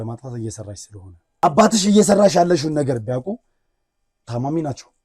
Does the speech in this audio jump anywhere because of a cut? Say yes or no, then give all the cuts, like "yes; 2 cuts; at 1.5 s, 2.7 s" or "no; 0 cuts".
yes; 1 cut; at 1.4 s